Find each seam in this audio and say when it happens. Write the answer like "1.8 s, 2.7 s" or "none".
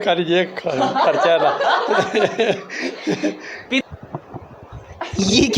3.8 s